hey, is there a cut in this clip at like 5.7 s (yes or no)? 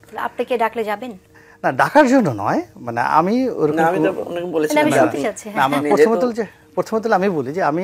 no